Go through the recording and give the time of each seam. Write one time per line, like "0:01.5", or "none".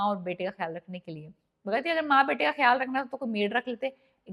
none